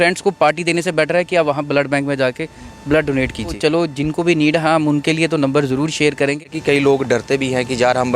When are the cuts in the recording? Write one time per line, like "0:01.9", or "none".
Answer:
0:03.6
0:06.5